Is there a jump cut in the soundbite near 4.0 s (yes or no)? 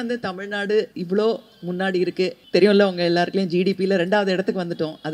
no